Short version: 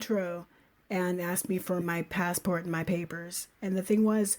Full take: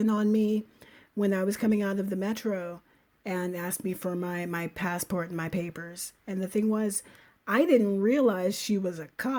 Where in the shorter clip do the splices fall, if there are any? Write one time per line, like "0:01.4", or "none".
0:01.8